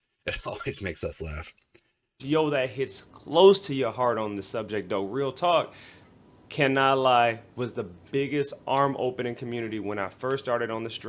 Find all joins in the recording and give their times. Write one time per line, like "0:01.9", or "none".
0:02.2